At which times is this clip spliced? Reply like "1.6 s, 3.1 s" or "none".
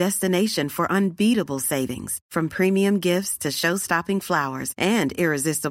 none

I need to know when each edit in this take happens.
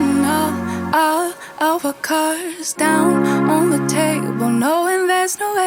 none

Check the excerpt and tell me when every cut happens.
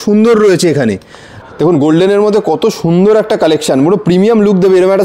1.3 s

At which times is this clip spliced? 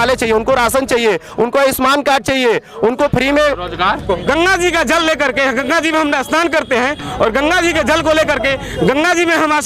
4.1 s

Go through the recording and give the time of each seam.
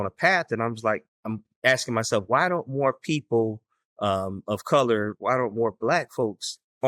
1.1 s

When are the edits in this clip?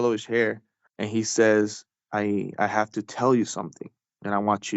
2.0 s

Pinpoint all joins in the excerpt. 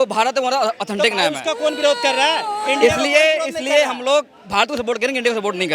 none

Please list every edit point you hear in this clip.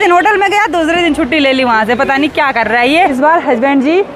3.1 s

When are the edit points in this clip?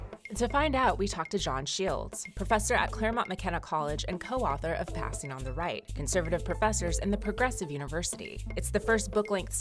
2.6 s

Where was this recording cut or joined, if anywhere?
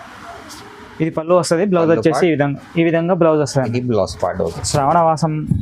4.5 s

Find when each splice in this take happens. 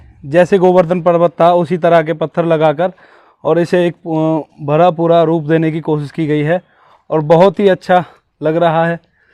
none

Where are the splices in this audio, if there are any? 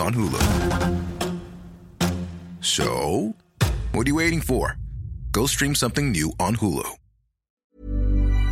7.5 s

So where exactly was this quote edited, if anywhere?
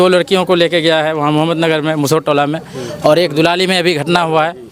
none

